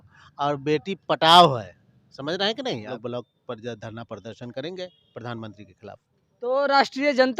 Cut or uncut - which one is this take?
cut